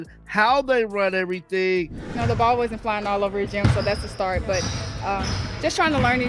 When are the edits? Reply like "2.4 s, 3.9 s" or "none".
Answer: 2.0 s

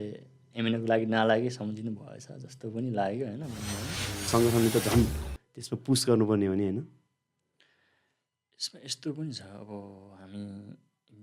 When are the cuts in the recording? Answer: 4.3 s

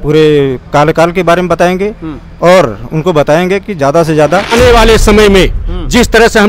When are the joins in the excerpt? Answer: 4.5 s

